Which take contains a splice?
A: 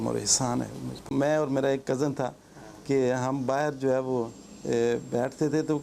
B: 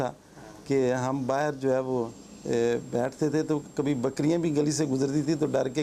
A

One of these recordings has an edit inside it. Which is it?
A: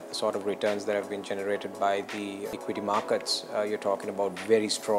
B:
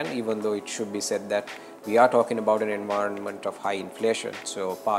A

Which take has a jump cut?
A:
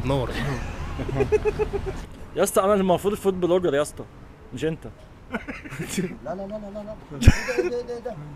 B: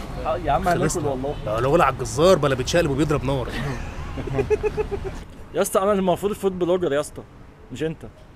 A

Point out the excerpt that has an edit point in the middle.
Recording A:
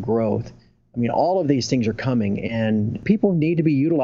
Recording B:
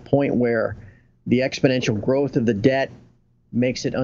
A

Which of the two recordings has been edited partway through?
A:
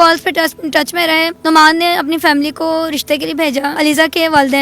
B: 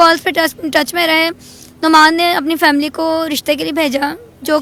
A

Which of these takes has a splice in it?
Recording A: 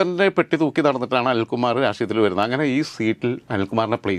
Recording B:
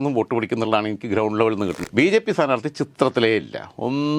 B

